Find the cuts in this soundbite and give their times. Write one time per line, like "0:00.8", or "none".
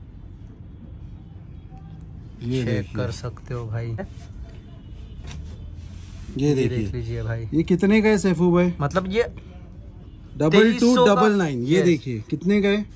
0:04.2